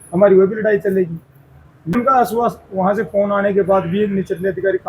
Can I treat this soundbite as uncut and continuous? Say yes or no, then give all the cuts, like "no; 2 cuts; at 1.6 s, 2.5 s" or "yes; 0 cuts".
no; 1 cut; at 1.9 s